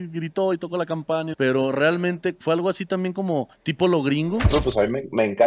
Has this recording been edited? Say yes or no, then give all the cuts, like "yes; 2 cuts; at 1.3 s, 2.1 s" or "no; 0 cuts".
yes; 4 cuts; at 1.3 s, 2.4 s, 3.6 s, 4.5 s